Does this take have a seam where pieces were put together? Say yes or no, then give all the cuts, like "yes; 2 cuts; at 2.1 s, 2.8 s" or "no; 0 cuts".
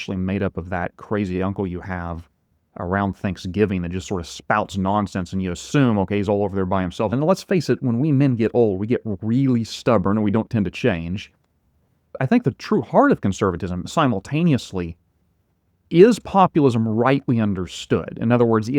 yes; 2 cuts; at 7.1 s, 12.2 s